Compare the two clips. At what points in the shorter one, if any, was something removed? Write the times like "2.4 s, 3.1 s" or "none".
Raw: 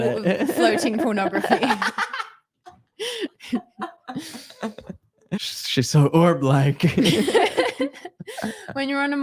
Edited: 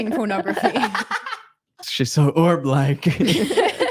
1.8 s